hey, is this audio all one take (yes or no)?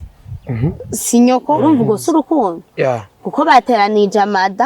no